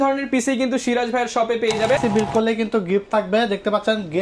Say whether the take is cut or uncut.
cut